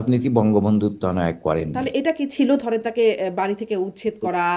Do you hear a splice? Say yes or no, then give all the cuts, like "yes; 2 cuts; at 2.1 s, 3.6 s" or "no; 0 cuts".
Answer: no; 0 cuts